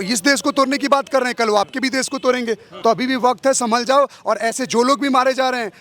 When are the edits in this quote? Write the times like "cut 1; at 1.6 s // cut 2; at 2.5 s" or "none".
cut 1; at 2.7 s